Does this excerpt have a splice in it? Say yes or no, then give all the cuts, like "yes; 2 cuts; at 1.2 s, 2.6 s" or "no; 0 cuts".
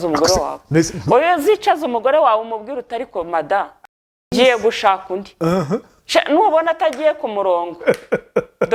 no; 0 cuts